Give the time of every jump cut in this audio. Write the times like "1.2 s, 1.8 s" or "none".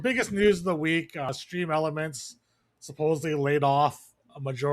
1.3 s